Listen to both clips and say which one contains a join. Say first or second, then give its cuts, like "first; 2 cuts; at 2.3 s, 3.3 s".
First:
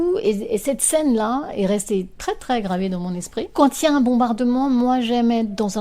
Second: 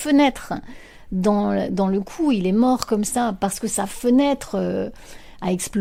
first; 1 cut; at 3.5 s